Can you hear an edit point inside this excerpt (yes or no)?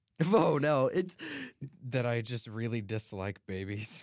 no